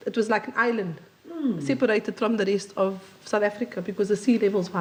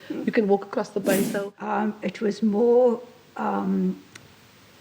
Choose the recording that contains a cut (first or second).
second